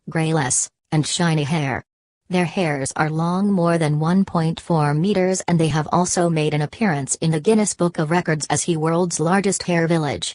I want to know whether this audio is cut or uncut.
cut